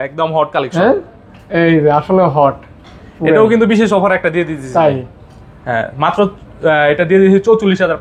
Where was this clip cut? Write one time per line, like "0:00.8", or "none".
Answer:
none